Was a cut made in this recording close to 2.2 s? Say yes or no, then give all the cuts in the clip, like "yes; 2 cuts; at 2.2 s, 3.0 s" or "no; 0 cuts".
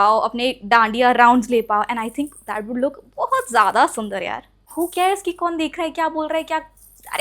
no; 1 cut; at 4.5 s